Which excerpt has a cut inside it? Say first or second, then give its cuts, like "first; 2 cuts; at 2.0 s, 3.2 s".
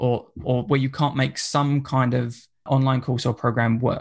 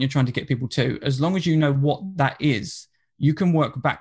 first; 1 cut; at 2.7 s